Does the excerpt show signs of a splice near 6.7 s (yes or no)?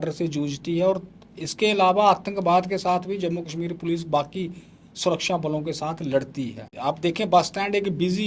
yes